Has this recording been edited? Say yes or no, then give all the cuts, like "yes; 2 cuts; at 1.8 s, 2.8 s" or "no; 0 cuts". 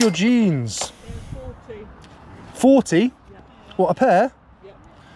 no; 0 cuts